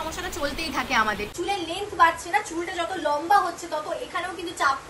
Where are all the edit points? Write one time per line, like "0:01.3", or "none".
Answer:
0:01.3